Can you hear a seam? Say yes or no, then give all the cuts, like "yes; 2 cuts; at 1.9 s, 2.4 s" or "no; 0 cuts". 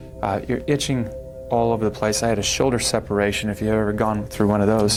no; 0 cuts